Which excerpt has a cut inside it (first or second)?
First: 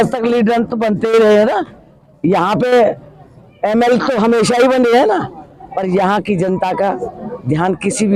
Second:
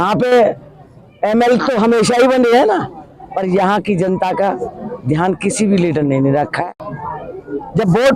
second